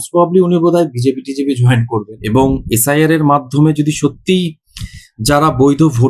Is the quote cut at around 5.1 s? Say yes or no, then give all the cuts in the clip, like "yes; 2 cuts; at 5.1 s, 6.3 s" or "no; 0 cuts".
no; 1 cut; at 2.1 s